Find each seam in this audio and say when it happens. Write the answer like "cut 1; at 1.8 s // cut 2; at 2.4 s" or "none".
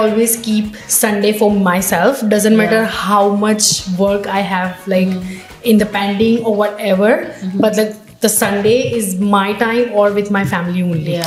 none